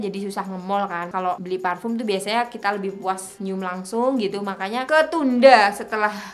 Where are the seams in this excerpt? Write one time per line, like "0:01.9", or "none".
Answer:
0:01.2
0:03.3
0:04.9